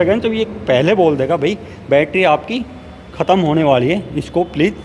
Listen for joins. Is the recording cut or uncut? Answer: uncut